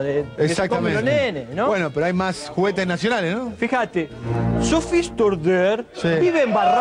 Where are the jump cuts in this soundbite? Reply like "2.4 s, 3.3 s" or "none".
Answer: none